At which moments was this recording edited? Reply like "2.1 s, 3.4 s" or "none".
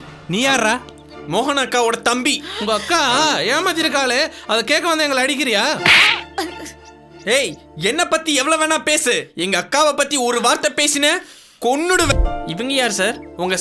12.1 s